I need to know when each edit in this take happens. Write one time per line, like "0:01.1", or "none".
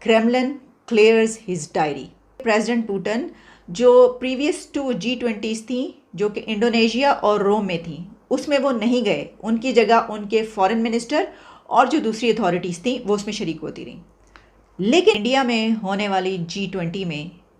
0:02.4
0:15.2